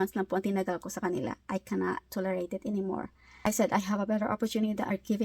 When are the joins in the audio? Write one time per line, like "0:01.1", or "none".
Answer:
0:03.3